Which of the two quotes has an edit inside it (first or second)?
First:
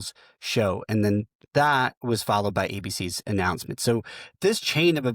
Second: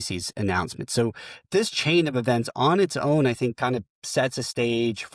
first